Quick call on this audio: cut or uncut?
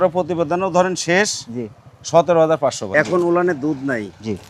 cut